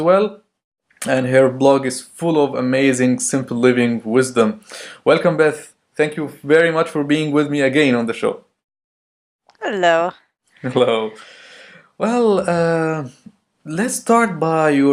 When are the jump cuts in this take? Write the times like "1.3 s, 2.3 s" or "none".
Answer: 2.6 s